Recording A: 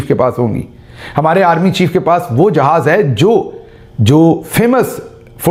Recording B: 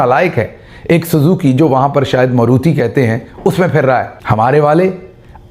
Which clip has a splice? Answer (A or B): B